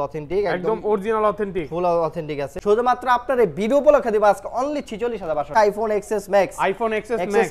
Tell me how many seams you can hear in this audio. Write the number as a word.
two